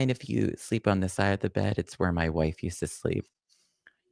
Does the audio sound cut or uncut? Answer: uncut